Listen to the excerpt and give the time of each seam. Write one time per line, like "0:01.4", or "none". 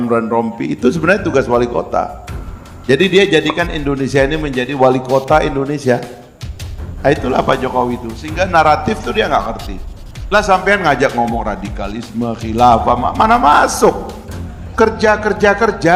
none